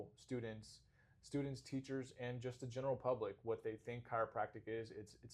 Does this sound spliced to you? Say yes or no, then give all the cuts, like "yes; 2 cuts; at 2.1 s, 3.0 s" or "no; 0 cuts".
no; 0 cuts